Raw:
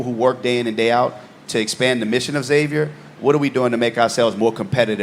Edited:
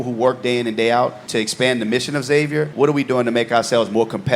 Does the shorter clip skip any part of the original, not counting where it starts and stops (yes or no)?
yes